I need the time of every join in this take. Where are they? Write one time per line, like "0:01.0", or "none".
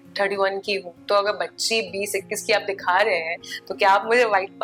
none